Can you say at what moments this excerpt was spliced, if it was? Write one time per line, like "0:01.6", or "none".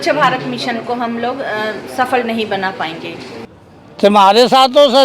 0:03.4